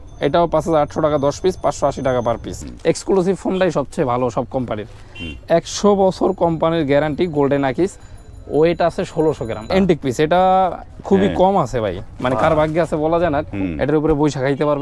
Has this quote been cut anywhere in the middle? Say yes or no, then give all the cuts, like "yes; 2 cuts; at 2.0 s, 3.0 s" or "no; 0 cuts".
yes; 3 cuts; at 2.5 s, 9.7 s, 13.6 s